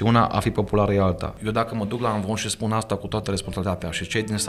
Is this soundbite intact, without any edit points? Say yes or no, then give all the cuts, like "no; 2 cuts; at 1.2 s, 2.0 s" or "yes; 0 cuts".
no; 1 cut; at 1.4 s